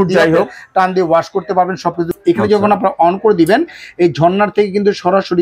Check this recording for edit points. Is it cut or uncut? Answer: cut